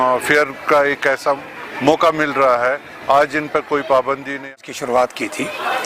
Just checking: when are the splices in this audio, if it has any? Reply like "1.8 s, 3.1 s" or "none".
4.5 s